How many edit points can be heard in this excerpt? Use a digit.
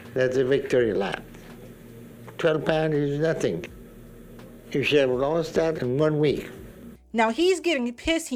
0